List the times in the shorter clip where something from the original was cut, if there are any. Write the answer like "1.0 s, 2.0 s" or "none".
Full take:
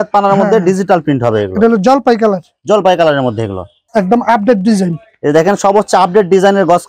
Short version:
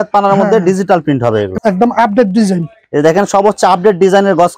1.5 s